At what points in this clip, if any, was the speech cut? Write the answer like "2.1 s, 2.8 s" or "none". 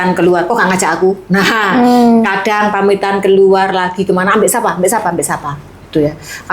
none